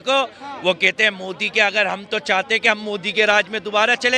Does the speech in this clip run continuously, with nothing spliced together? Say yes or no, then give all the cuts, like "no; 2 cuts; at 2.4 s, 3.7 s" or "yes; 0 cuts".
yes; 0 cuts